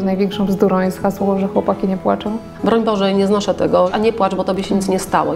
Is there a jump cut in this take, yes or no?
yes